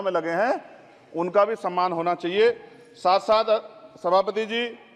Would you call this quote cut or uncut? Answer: uncut